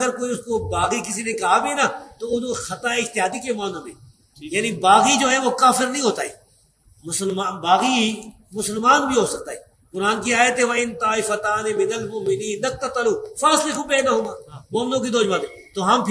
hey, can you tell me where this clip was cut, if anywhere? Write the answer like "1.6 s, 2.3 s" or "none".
none